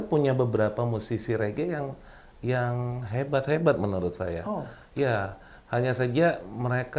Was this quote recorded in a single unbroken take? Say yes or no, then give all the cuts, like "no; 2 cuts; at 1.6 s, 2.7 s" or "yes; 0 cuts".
yes; 0 cuts